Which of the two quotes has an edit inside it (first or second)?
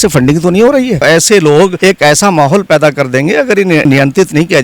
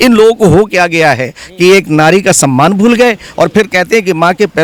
first